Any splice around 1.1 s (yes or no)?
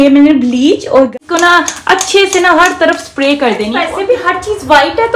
yes